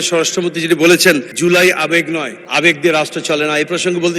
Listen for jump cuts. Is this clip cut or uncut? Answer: cut